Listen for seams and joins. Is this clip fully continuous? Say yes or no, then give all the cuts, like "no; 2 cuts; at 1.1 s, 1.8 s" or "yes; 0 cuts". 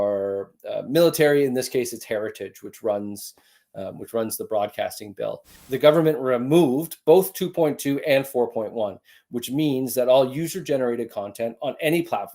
no; 1 cut; at 5.5 s